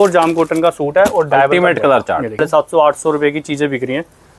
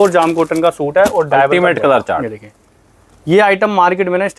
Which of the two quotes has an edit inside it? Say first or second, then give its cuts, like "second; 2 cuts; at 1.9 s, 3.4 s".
first; 1 cut; at 2.4 s